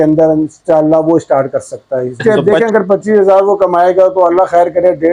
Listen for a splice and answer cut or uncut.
cut